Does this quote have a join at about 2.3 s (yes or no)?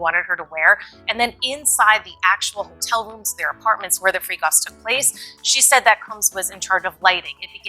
no